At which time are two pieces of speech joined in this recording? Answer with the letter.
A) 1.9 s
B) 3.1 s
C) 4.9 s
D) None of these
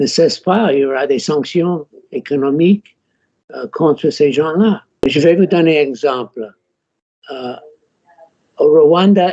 C